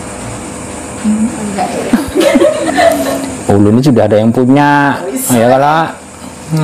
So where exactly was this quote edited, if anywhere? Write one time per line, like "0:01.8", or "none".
0:02.6